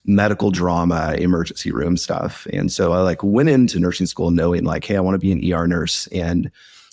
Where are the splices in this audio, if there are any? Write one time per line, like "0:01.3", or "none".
none